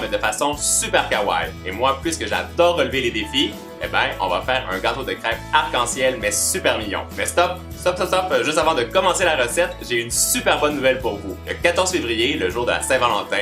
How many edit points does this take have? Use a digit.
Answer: 1